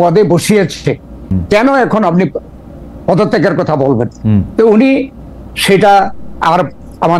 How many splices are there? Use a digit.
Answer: 1